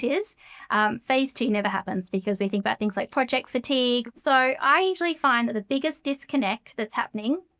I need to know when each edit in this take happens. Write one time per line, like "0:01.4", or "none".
0:04.1